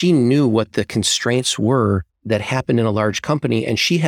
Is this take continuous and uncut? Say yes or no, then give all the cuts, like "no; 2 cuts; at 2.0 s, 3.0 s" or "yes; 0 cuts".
no; 1 cut; at 2.1 s